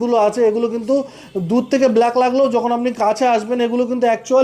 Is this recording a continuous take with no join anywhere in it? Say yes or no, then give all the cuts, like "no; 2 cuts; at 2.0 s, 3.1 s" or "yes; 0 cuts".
yes; 0 cuts